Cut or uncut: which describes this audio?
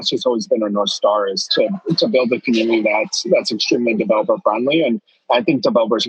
uncut